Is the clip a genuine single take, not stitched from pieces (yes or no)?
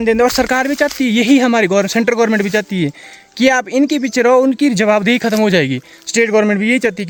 yes